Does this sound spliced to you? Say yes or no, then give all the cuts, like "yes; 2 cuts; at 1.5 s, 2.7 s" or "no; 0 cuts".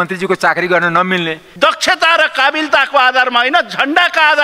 yes; 1 cut; at 1.4 s